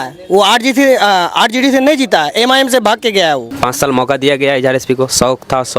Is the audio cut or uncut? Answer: cut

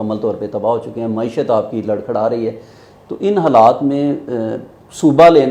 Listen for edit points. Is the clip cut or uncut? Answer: uncut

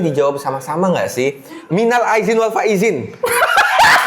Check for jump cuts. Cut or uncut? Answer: cut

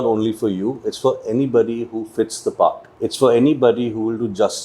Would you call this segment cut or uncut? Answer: cut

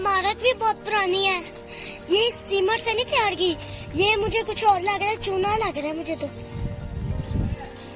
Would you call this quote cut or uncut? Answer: uncut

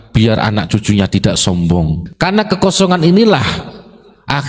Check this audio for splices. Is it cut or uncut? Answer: cut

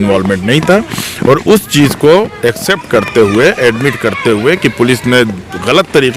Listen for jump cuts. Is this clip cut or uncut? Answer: uncut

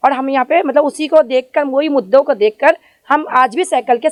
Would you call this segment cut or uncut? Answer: uncut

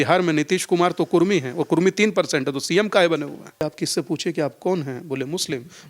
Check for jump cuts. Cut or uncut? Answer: cut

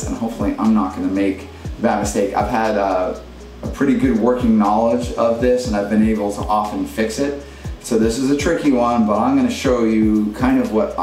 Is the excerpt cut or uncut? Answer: uncut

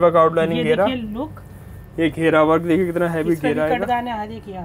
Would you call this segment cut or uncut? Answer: uncut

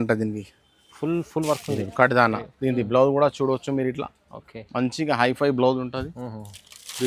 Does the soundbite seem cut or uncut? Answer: uncut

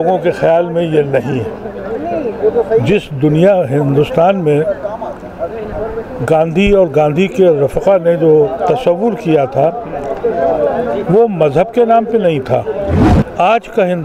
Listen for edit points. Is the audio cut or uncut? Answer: cut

